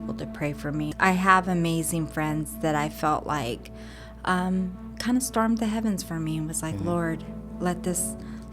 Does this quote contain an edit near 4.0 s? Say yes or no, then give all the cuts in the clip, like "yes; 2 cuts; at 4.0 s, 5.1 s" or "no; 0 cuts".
no; 1 cut; at 0.9 s